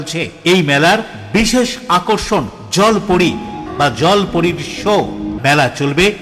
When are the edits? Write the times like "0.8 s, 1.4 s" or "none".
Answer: 3.7 s, 5.3 s